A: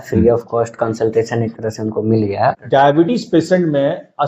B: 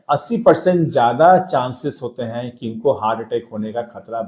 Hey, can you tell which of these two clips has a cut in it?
A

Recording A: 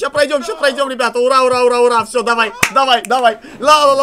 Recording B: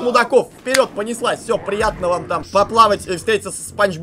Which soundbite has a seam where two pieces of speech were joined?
B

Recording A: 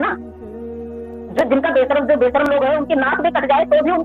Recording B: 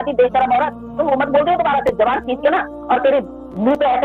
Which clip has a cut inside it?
B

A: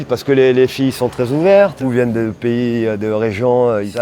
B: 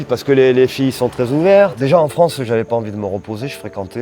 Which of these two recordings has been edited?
B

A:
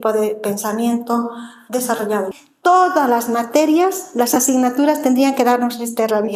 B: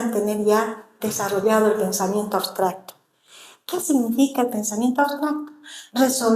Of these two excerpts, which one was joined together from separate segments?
A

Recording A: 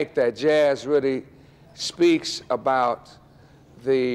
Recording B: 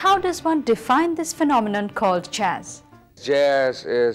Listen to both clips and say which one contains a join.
B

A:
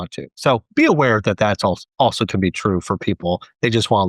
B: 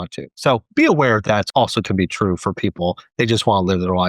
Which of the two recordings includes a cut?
B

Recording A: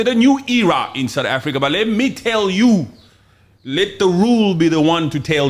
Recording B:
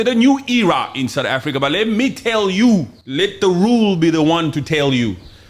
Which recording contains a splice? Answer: B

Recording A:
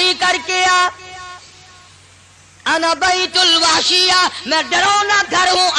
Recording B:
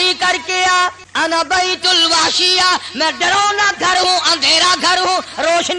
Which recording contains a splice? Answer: B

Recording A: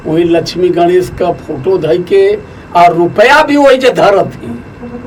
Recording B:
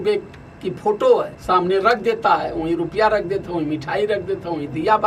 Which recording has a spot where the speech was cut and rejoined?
B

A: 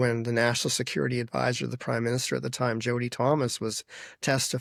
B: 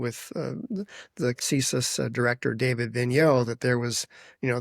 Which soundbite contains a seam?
B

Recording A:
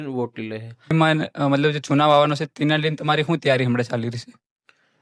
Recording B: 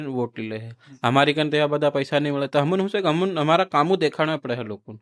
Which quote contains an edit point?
A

